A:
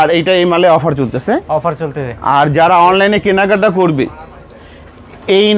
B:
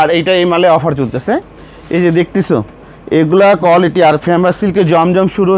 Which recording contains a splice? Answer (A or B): B